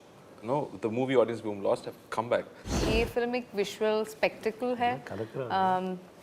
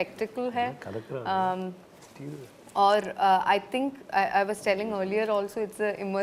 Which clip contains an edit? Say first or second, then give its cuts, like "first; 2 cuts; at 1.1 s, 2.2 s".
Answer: first; 1 cut; at 2.8 s